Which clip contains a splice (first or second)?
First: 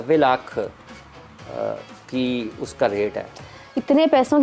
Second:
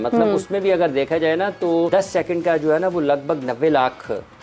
second